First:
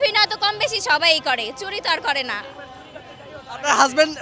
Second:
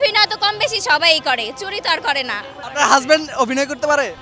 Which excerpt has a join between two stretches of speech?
second; 1 cut; at 2.6 s

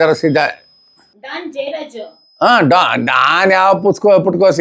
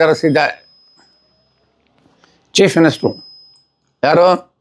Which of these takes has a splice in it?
first; 1 cut; at 1.1 s

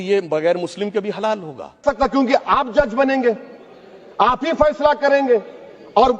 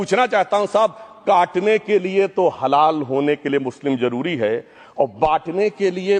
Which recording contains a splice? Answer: first; 1 cut; at 1.8 s

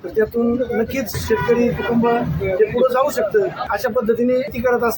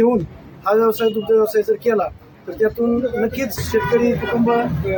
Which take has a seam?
first; 1 cut; at 3.7 s

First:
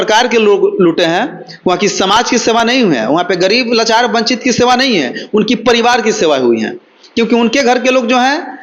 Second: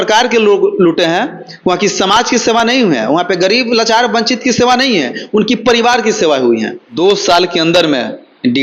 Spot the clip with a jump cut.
second; 1 cut; at 6.8 s

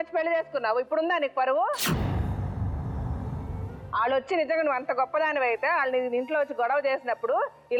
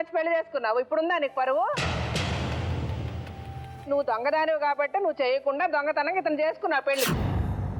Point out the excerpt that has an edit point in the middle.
second; 3 cuts; at 1.8 s, 3.9 s, 7.1 s

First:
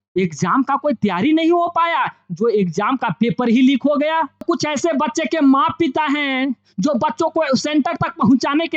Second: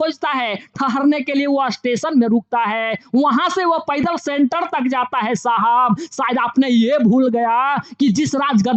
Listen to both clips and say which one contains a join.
first; 1 cut; at 4.4 s

